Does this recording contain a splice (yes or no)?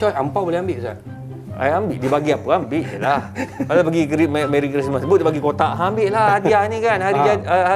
no